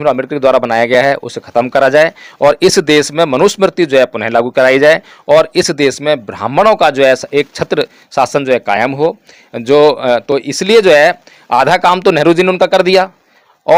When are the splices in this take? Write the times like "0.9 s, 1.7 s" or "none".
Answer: none